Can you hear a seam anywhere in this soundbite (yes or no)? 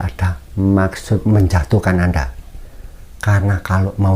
yes